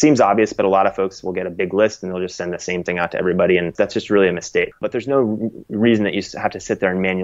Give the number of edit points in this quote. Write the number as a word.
two